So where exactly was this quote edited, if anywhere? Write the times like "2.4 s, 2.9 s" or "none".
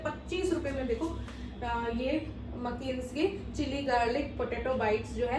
none